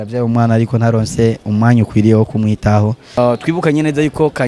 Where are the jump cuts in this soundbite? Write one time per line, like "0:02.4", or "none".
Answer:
0:03.2